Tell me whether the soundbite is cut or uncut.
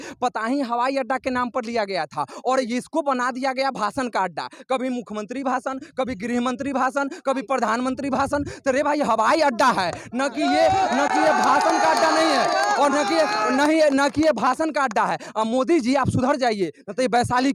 uncut